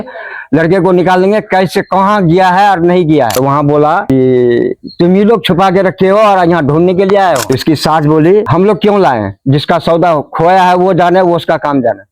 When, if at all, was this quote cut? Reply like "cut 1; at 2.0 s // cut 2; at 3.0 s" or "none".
cut 1; at 3.3 s // cut 2; at 7.4 s